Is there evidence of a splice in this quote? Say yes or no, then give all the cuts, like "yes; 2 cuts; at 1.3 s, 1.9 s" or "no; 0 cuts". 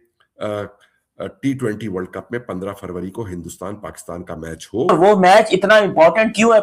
yes; 1 cut; at 4.9 s